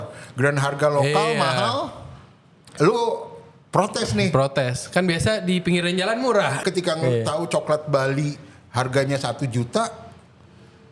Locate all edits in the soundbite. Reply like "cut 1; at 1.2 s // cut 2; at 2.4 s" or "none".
cut 1; at 6.6 s